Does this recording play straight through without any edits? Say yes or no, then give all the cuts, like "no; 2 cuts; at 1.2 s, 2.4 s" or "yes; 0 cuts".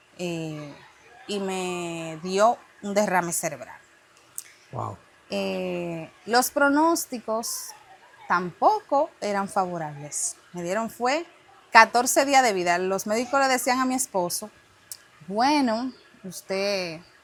yes; 0 cuts